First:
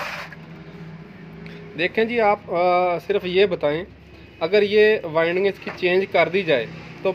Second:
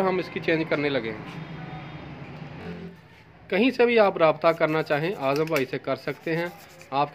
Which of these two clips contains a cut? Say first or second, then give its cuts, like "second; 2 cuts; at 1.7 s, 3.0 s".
second; 1 cut; at 2.9 s